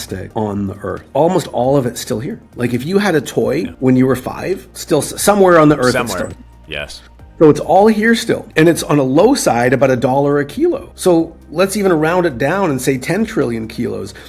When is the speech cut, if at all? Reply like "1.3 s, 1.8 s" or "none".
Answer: 1.0 s